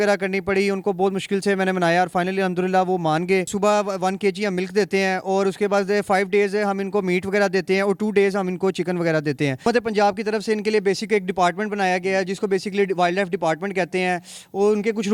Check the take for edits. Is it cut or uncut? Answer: cut